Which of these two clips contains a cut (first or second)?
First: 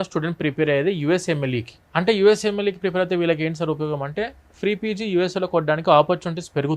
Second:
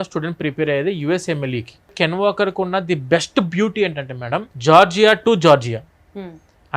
second